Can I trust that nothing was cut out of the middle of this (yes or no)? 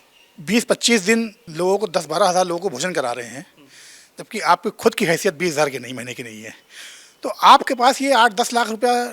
no